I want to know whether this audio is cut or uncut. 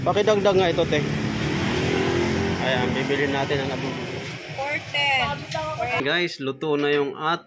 cut